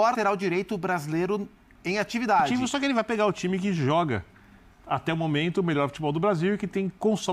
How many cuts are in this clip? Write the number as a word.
one